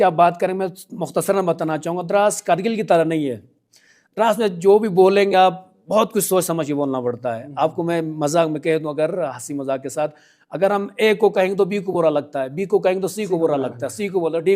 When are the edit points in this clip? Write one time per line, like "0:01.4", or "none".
none